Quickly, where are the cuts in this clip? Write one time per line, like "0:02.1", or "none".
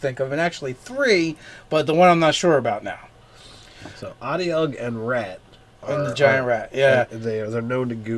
0:01.3